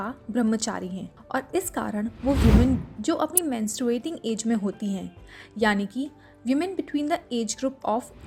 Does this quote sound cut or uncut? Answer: uncut